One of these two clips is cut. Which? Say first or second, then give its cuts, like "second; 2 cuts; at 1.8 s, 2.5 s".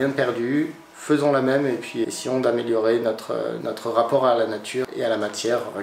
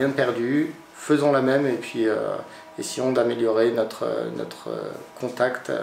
first; 3 cuts; at 2.0 s, 3.6 s, 4.9 s